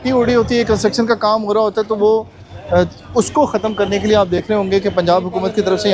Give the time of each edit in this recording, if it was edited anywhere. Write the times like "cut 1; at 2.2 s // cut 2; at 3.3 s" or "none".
none